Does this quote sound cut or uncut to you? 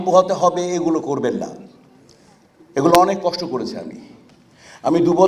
uncut